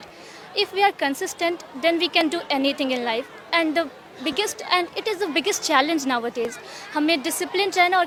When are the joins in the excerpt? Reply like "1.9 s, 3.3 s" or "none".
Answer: none